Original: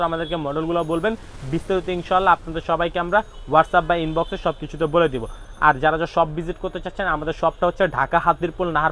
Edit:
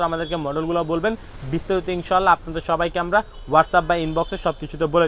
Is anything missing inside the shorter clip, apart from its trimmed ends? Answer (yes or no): no